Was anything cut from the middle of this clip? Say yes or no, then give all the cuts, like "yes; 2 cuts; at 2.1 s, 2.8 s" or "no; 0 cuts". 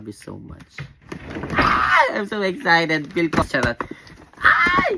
yes; 1 cut; at 3.4 s